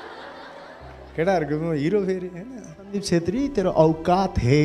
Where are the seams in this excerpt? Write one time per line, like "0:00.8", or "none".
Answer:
0:03.0

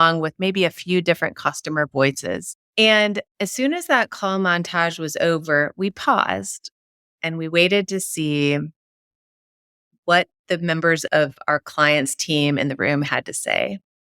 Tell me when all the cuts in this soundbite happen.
0:02.6

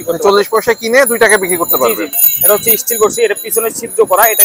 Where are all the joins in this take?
0:02.2

